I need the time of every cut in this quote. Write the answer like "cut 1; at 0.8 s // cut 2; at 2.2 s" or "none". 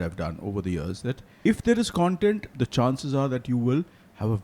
cut 1; at 1.3 s // cut 2; at 2.5 s